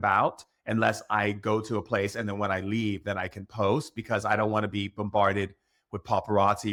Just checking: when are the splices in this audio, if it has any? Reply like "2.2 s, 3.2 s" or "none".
none